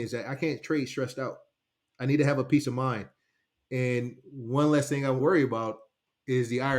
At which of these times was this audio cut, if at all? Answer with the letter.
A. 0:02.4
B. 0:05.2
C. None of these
B